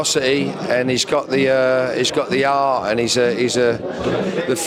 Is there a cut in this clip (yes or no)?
no